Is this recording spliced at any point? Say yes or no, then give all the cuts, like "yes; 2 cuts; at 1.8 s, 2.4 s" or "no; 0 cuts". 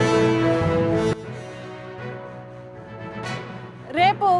yes; 1 cut; at 3.0 s